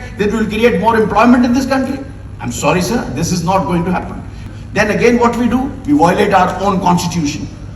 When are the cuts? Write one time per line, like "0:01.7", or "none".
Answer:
0:04.4